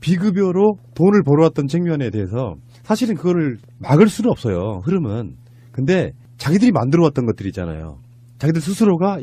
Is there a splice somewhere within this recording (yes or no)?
no